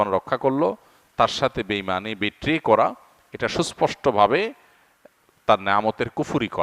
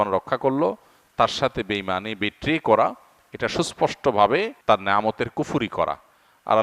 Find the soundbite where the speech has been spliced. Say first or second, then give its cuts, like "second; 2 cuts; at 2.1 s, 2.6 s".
second; 1 cut; at 4.5 s